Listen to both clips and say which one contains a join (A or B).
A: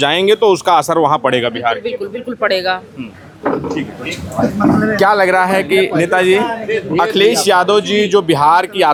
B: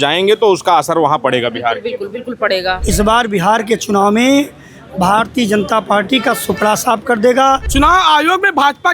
B